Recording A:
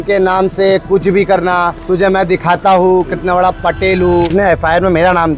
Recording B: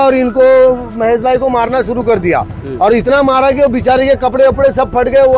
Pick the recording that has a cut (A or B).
A